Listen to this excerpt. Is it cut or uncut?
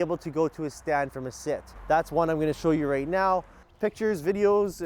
cut